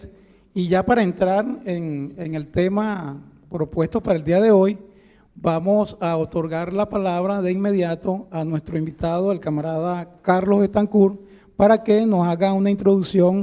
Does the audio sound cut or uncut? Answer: cut